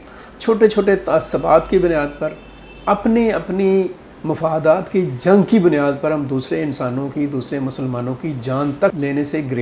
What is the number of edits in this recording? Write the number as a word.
zero